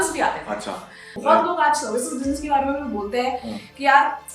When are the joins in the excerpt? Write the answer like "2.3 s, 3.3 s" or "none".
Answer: 1.0 s